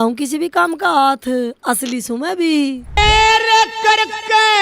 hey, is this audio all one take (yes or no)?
no